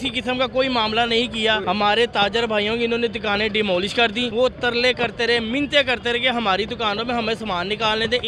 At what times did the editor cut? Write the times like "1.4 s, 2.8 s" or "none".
1.6 s, 4.3 s